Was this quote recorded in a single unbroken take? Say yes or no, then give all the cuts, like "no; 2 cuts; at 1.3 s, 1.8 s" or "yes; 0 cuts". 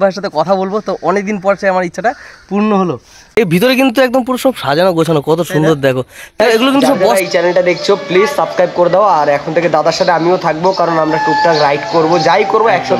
no; 2 cuts; at 3.4 s, 7.1 s